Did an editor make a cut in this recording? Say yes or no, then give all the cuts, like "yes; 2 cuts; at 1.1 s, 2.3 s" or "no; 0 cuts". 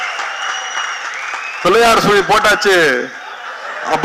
no; 0 cuts